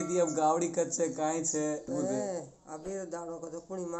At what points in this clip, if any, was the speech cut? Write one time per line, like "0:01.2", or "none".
0:01.9